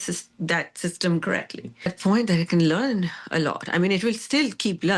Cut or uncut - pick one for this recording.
cut